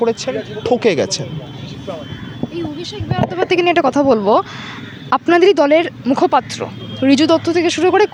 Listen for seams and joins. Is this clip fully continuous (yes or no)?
yes